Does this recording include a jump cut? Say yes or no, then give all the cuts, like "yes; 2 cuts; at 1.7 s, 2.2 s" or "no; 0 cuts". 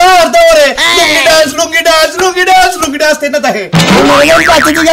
yes; 1 cut; at 3.7 s